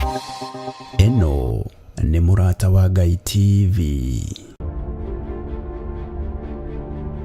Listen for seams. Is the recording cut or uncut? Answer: cut